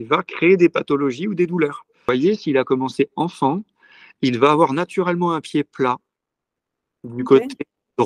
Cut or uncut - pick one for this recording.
cut